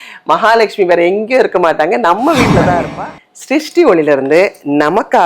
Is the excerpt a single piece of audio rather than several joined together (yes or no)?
no